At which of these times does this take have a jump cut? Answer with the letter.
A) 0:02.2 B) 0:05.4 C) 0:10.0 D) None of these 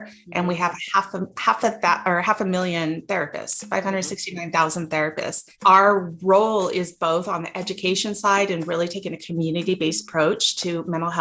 B